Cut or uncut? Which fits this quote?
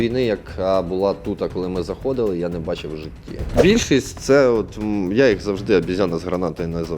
cut